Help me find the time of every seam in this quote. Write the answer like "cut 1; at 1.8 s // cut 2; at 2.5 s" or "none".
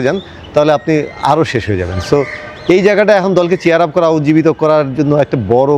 none

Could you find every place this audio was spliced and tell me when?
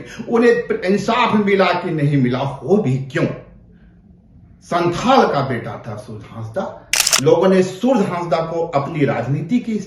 cut 1; at 7.0 s

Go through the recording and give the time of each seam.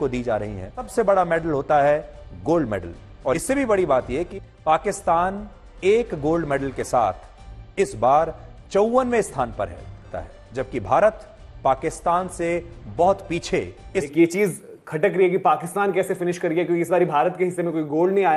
cut 1; at 0.9 s // cut 2; at 3.4 s // cut 3; at 4.4 s // cut 4; at 10.0 s // cut 5; at 14.1 s

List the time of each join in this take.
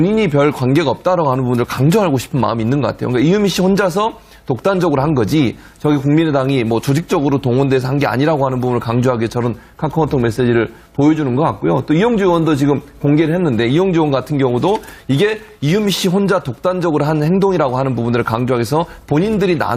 cut 1; at 14.9 s

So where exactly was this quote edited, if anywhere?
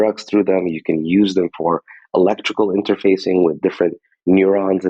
none

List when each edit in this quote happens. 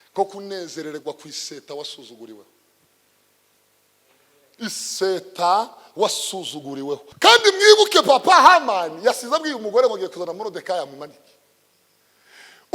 cut 1; at 7.1 s

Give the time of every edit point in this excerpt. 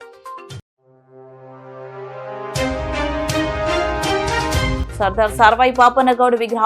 cut 1; at 4.8 s

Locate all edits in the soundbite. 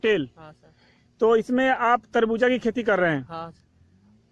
none

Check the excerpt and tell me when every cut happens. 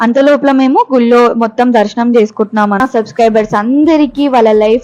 cut 1; at 2.8 s

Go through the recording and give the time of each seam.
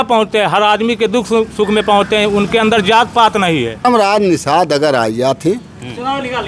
cut 1; at 3.8 s

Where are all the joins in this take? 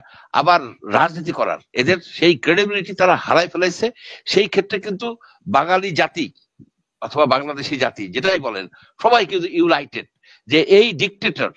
none

